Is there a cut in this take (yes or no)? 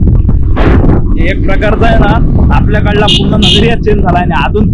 no